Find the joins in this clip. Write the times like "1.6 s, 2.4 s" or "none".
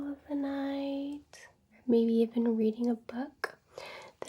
1.7 s

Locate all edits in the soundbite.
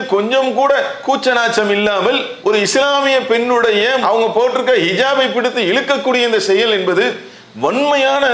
7.2 s

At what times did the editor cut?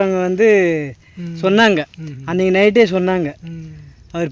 none

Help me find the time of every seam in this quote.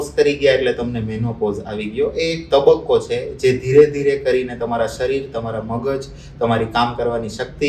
none

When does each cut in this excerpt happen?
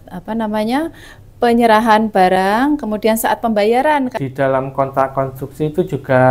4.1 s

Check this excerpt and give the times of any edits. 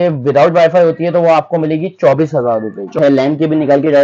3.0 s

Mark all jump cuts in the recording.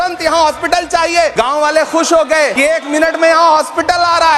1.3 s, 2.5 s

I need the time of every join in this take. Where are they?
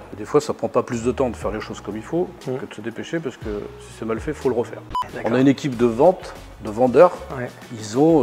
5.0 s

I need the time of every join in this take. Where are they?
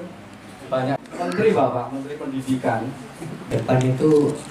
1.0 s, 3.5 s

